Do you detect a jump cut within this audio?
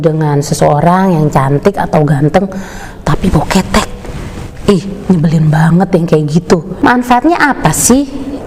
yes; 1 cut; at 6.7 s

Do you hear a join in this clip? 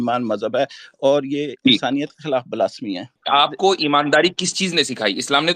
yes; 1 cut; at 3.2 s

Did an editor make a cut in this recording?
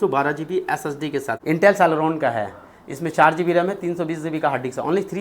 yes; 1 cut; at 1.4 s

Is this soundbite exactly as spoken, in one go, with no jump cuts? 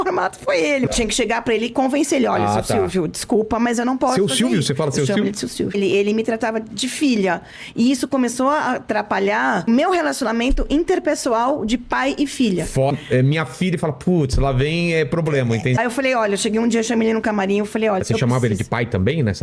no; 6 cuts; at 0.9 s, 5.8 s, 9.7 s, 12.9 s, 15.8 s, 18.0 s

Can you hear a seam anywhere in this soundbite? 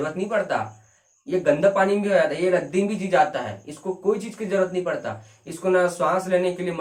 no; 0 cuts

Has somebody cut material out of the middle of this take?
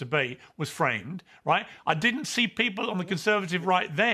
no; 0 cuts

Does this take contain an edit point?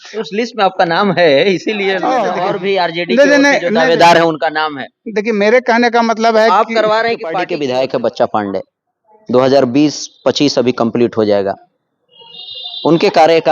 yes; 2 cuts; at 2.3 s, 7.5 s

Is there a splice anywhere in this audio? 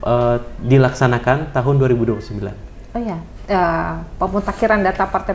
no; 0 cuts

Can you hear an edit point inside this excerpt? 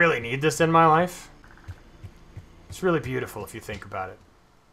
yes; 1 cut; at 1.4 s

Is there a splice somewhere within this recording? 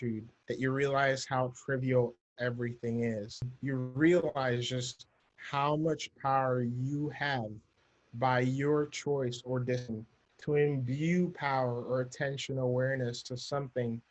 yes; 1 cut; at 3.5 s

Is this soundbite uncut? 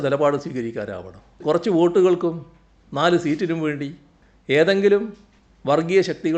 no; 1 cut; at 1.3 s

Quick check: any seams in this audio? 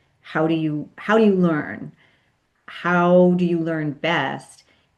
no; 0 cuts

